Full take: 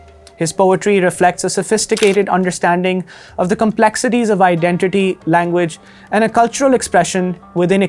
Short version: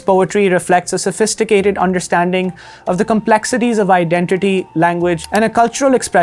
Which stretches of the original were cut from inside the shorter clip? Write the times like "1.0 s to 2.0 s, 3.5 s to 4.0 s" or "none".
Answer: 5.7 s to 6.0 s